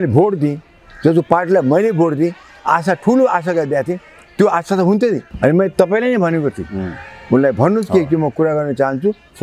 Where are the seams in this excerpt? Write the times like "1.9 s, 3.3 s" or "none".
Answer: 5.3 s